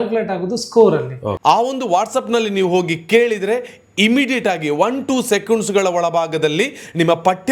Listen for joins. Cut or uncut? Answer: cut